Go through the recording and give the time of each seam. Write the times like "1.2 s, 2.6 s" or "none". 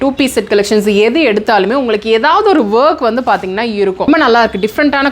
4.1 s